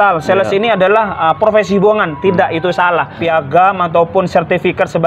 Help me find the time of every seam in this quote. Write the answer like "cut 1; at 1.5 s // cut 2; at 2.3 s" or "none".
cut 1; at 3.1 s